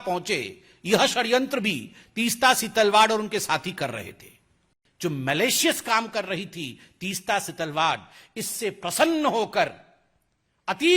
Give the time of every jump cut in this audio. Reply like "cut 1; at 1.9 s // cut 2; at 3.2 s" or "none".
cut 1; at 4.4 s